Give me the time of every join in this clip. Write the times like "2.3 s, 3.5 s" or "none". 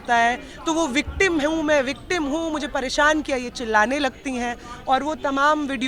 none